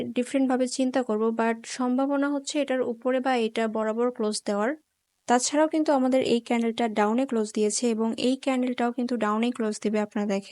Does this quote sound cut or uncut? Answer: cut